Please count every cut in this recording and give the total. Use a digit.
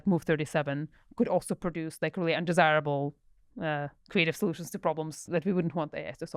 1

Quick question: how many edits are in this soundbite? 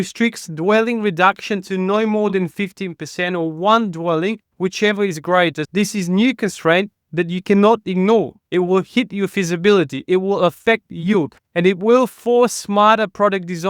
1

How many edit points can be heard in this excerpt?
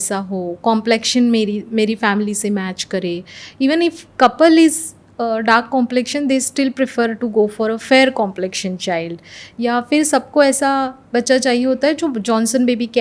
0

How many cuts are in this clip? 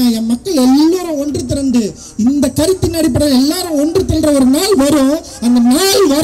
0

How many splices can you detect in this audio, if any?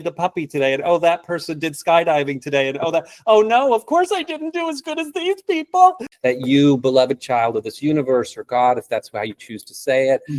1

